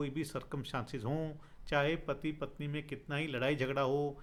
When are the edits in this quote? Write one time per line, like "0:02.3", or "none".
none